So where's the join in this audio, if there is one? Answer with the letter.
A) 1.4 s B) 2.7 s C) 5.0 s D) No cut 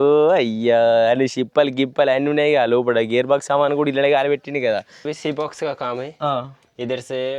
C